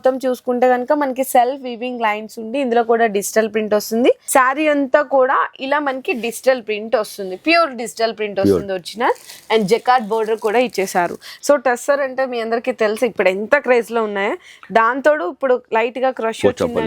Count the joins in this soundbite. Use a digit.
2